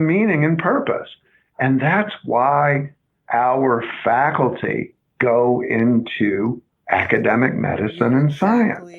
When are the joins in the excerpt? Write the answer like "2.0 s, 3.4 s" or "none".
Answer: 5.0 s, 6.7 s